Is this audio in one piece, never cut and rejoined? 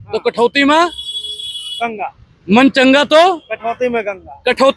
yes; 0 cuts

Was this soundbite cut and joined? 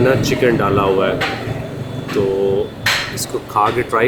no; 0 cuts

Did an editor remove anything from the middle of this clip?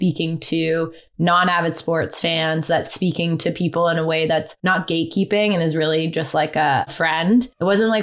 yes; 3 cuts; at 2.9 s, 4.5 s, 7.3 s

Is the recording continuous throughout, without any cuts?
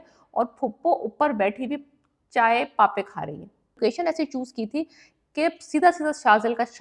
no; 1 cut; at 3.8 s

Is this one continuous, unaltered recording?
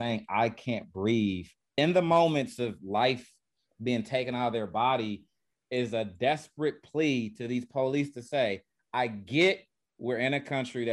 no; 1 cut; at 1.7 s

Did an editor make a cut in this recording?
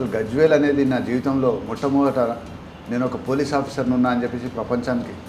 no; 0 cuts

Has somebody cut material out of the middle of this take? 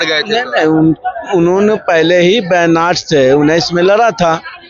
no; 0 cuts

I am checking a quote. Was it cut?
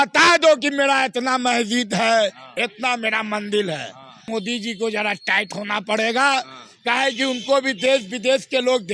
yes; 1 cut; at 4.2 s

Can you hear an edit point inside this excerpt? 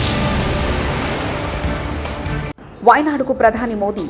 yes; 1 cut; at 2.6 s

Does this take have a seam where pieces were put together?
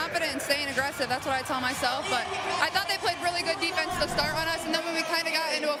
no; 0 cuts

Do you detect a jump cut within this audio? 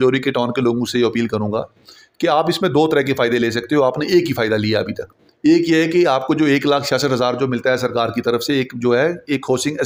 no; 0 cuts

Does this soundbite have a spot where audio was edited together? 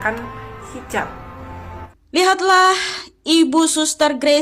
yes; 1 cut; at 1.6 s

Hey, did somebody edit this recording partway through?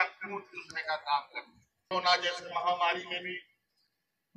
yes; 1 cut; at 1.9 s

